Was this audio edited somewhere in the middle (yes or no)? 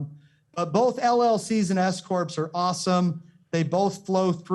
no